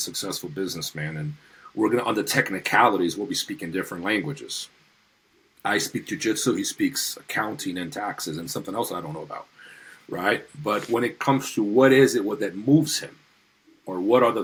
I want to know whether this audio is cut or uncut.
uncut